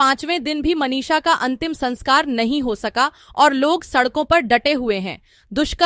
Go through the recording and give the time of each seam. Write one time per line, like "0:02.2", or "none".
none